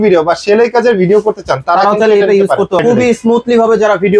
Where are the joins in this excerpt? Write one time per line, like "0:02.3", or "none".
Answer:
0:02.8